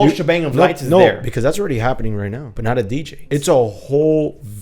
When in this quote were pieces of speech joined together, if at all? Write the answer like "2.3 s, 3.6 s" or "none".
2.7 s